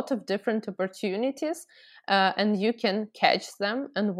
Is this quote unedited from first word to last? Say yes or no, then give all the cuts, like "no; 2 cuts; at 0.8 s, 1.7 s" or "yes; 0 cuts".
yes; 0 cuts